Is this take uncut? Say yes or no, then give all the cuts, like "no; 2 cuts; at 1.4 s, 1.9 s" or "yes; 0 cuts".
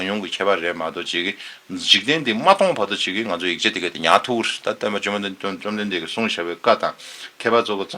yes; 0 cuts